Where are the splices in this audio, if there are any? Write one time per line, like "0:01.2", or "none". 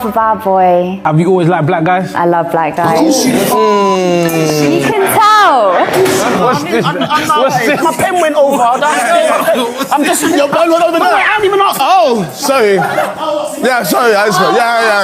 none